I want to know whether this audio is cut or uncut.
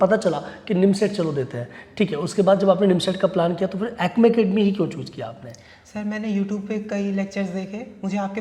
uncut